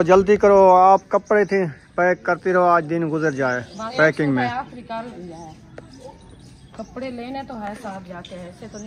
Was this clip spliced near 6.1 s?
no; 1 cut; at 3.8 s

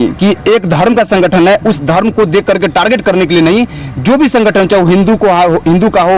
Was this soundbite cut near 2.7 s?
no; 0 cuts

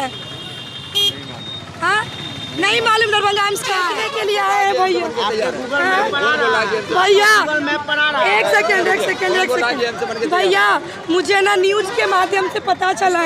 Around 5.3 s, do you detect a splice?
no; 1 cut; at 4.0 s

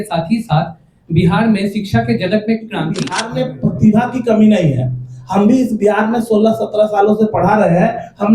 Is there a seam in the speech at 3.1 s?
yes; 1 cut; at 3.1 s

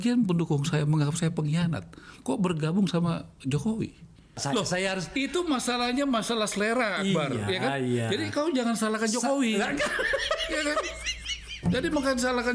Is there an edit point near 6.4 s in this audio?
no; 1 cut; at 4.4 s

